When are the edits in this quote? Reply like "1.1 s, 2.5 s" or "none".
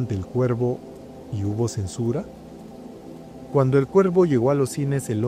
none